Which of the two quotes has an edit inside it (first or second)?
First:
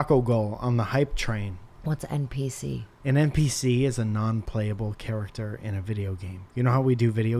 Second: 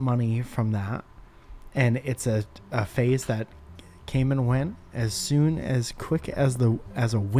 first